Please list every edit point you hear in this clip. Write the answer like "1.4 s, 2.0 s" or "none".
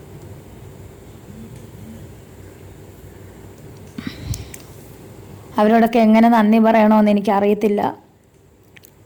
none